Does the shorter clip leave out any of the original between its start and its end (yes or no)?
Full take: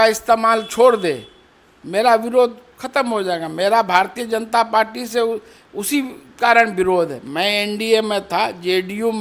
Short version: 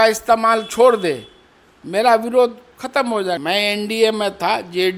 yes